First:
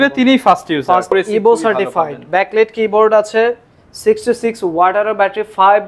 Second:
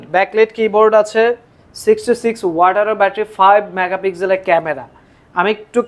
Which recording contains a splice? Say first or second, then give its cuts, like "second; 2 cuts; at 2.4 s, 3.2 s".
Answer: first; 1 cut; at 1.1 s